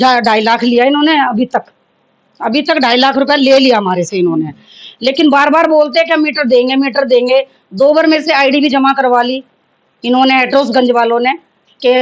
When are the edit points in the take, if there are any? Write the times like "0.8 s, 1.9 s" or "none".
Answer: none